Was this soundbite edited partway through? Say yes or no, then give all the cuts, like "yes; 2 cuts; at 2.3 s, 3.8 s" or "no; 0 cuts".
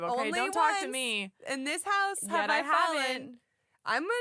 no; 0 cuts